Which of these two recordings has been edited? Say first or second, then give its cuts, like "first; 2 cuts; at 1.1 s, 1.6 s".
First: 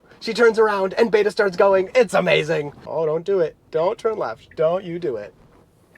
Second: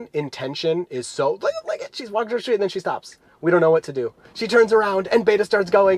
first; 1 cut; at 2.8 s